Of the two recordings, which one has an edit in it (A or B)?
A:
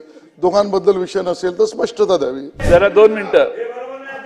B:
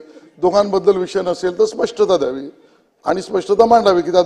A